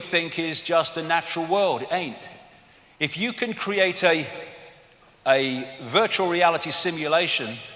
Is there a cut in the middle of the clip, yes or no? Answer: no